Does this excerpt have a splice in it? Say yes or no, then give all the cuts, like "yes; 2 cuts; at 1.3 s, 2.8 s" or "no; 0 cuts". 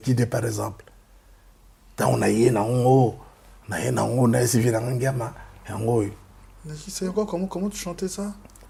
no; 0 cuts